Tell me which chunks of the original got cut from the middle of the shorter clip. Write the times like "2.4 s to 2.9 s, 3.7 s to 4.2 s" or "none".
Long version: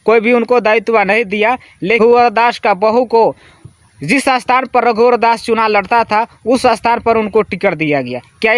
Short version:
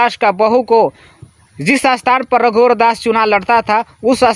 none